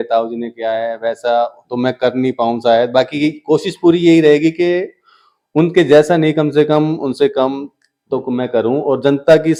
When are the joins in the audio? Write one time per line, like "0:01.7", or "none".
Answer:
none